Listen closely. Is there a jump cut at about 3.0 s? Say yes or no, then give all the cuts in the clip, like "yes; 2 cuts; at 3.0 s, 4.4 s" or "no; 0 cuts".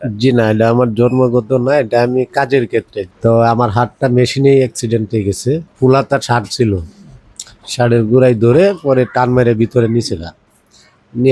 yes; 2 cuts; at 3.0 s, 5.7 s